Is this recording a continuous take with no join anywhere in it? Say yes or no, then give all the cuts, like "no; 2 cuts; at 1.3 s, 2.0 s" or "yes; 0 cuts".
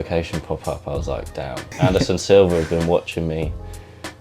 no; 1 cut; at 1.7 s